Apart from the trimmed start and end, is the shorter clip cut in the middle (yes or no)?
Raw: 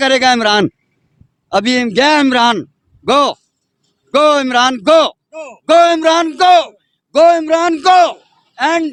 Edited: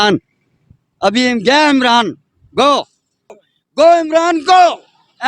yes